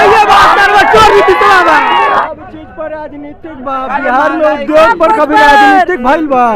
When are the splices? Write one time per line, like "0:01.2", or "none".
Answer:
0:02.2